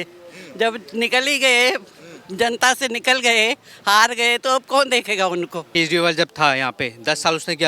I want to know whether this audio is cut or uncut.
cut